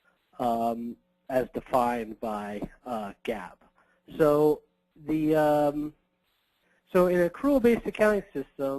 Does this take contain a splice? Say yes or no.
yes